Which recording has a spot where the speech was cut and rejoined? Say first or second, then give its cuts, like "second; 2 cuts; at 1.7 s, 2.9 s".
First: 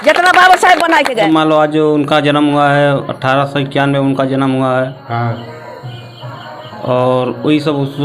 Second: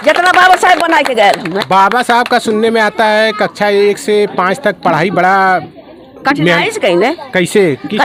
first; 1 cut; at 1.2 s